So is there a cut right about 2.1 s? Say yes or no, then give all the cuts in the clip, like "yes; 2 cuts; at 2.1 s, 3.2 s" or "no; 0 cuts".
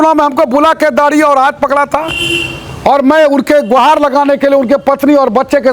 no; 0 cuts